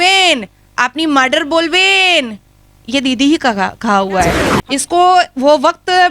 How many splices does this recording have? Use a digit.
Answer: 1